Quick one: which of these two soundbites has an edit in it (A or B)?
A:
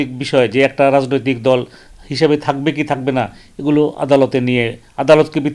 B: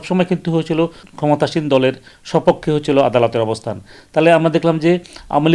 B